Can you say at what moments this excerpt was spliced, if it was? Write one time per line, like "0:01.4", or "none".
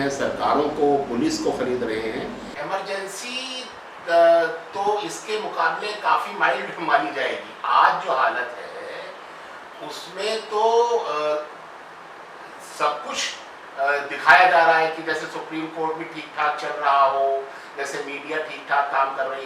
0:02.5